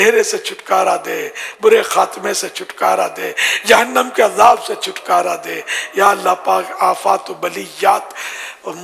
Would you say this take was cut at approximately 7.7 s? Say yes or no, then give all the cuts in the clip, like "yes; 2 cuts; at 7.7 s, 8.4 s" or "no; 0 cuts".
no; 0 cuts